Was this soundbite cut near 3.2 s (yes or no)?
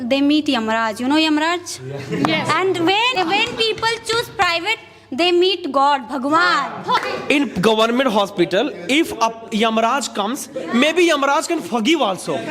yes